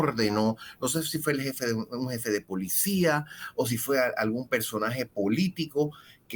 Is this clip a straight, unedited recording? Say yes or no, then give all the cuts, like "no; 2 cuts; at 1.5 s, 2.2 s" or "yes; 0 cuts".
yes; 0 cuts